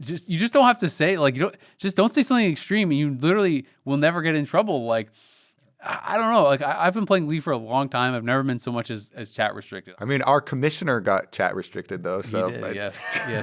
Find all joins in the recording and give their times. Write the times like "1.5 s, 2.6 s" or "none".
9.8 s